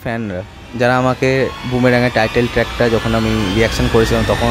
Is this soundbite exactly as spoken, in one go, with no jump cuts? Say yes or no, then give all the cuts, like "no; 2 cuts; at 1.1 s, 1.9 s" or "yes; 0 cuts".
no; 1 cut; at 1.6 s